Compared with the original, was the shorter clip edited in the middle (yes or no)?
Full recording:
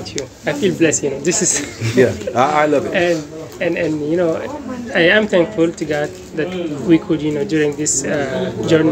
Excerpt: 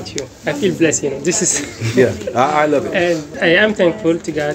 yes